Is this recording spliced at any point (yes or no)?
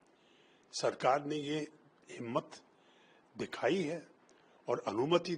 no